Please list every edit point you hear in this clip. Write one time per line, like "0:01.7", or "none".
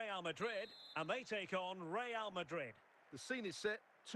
0:02.9